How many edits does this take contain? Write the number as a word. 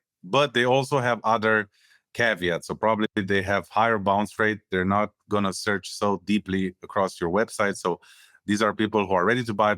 zero